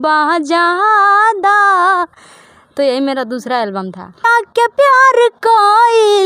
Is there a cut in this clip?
yes; 1 cut; at 4.3 s

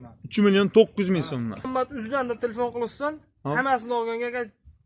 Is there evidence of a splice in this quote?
yes; 1 cut; at 1.7 s

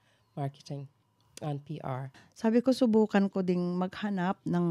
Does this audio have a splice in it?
yes; 1 cut; at 2.1 s

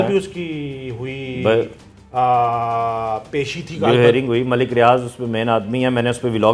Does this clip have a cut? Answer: no; 0 cuts

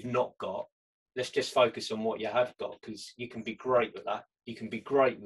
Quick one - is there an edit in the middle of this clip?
no; 0 cuts

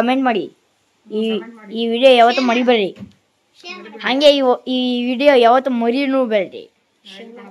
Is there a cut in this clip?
no; 0 cuts

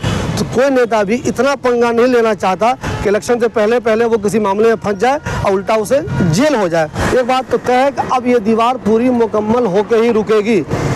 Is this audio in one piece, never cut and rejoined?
no; 1 cut; at 7.0 s

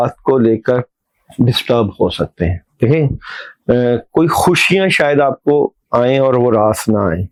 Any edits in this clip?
no; 0 cuts

